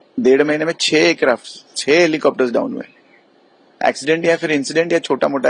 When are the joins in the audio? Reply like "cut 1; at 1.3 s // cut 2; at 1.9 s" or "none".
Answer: none